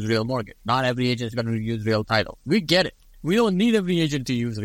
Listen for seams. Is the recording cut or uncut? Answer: cut